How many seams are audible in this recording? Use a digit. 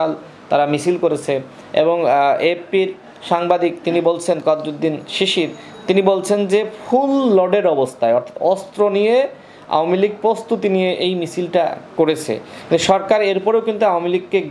0